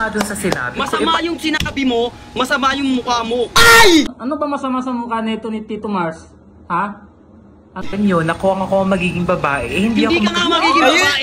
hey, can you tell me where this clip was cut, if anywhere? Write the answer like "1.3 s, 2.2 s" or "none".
4.1 s, 7.8 s

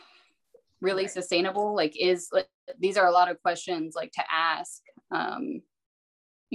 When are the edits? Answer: none

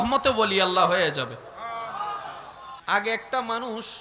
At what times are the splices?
2.8 s

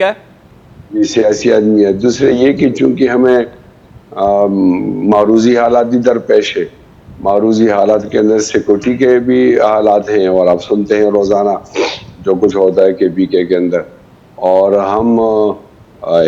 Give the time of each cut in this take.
none

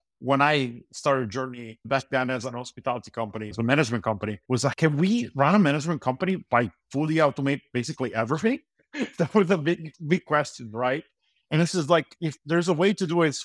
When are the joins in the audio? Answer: 1.8 s, 3.5 s, 4.8 s, 8.8 s

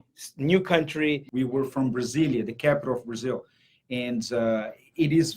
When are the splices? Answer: 1.2 s

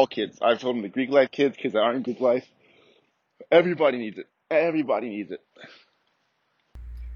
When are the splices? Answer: none

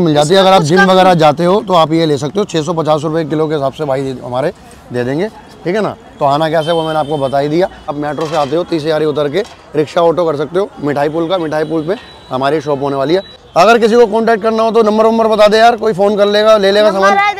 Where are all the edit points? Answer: none

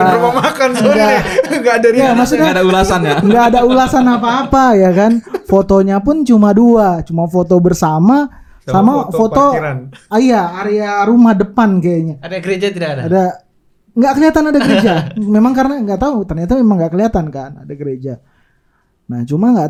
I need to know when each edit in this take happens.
none

